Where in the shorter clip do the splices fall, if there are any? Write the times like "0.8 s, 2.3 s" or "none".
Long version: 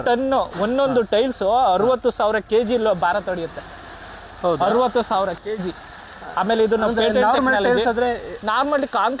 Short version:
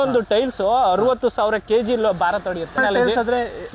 2.8 s